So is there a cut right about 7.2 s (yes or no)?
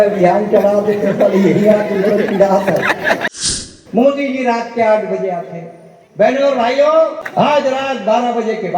yes